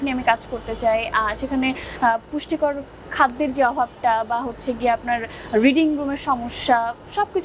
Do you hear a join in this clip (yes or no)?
no